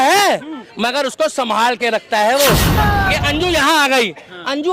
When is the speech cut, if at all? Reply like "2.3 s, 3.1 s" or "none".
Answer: 2.7 s